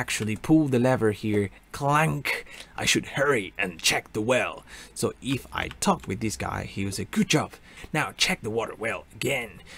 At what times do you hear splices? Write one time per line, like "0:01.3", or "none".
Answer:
0:07.7